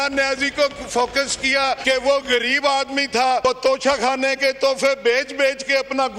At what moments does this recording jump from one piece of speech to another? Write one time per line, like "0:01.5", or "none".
0:01.8
0:03.4